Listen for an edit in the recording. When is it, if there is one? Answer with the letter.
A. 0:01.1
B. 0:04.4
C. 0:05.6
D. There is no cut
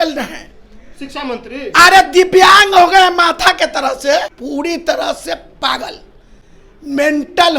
B